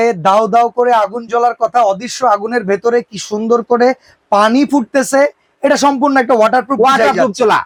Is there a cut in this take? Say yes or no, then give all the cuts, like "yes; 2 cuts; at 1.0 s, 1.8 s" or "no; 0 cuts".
no; 0 cuts